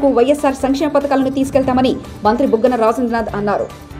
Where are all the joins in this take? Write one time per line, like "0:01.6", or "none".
none